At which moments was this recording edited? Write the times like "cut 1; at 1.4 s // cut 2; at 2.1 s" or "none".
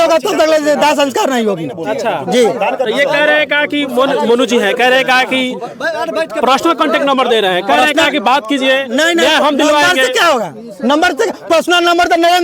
none